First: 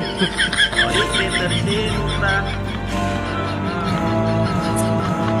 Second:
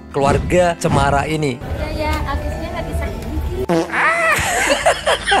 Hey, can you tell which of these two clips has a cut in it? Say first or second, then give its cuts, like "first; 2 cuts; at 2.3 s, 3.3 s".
second; 1 cut; at 1.6 s